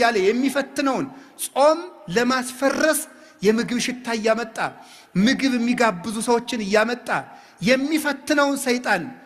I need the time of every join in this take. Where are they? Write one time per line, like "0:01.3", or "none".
none